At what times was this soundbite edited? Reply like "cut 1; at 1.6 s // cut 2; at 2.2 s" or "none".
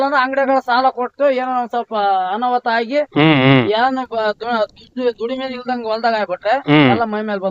none